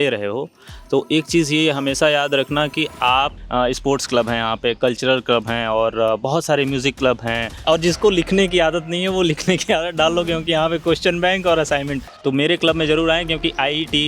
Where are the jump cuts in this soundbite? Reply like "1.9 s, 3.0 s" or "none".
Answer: 3.4 s, 7.6 s, 12.1 s